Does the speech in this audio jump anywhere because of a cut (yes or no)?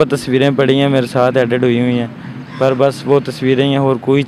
no